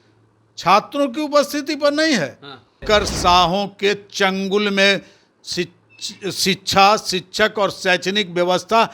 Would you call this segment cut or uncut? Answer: cut